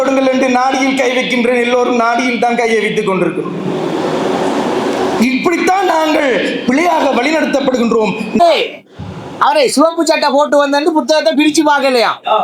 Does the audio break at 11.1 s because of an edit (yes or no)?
no